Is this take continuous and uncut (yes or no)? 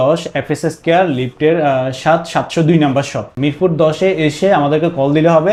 yes